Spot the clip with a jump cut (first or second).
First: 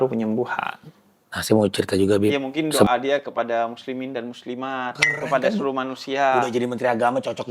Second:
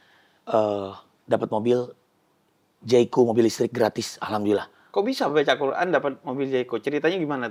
first